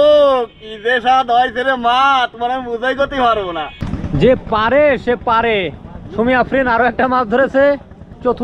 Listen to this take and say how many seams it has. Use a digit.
1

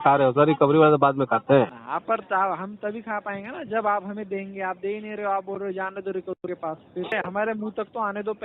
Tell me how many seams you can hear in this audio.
2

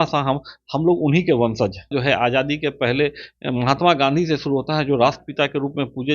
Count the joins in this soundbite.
1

